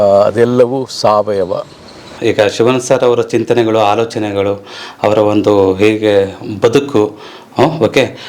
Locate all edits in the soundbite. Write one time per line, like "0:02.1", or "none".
0:02.1